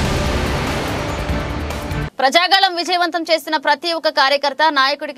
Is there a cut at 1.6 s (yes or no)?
no